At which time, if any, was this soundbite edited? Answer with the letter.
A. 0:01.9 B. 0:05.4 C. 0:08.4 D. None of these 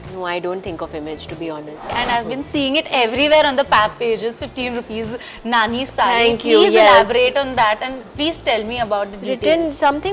A